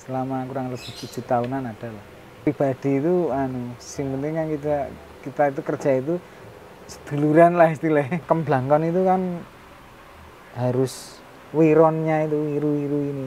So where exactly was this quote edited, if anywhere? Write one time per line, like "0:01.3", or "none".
0:02.5
0:08.2